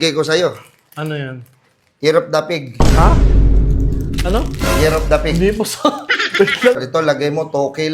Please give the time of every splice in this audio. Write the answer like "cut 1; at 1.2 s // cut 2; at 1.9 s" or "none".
cut 1; at 6.8 s